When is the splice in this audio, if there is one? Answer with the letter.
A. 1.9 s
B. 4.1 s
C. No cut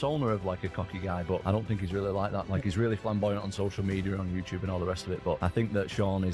C